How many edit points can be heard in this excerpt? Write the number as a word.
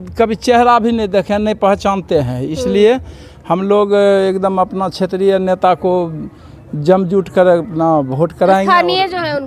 zero